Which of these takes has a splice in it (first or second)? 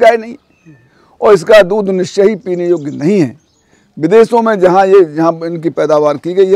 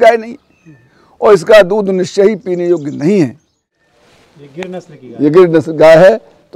second